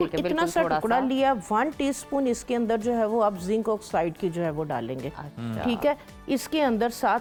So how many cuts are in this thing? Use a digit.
0